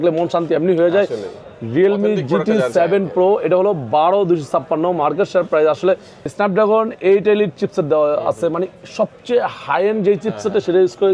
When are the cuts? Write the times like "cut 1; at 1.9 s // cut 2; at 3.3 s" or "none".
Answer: none